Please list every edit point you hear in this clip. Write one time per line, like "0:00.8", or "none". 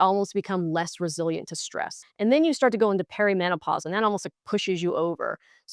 0:02.0